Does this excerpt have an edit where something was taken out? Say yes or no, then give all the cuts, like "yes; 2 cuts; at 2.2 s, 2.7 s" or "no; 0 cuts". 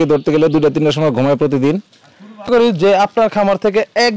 yes; 1 cut; at 2.5 s